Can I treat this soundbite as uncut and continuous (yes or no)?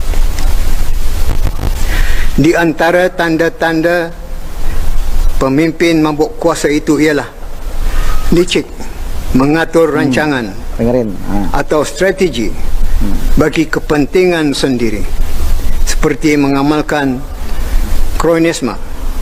yes